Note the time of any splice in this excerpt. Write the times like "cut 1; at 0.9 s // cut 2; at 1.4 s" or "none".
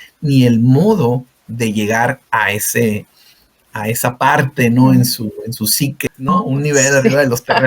cut 1; at 6.1 s